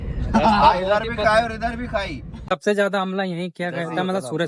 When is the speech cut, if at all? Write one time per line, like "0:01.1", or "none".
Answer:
0:02.3